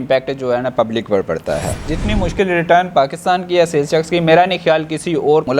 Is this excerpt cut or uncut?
cut